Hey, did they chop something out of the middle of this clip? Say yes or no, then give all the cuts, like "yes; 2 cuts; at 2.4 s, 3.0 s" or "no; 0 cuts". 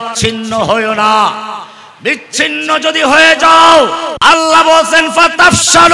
yes; 1 cut; at 4.1 s